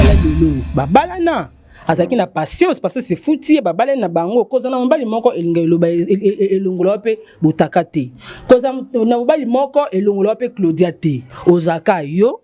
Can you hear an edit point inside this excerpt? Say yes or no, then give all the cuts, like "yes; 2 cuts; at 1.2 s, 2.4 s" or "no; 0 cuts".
no; 0 cuts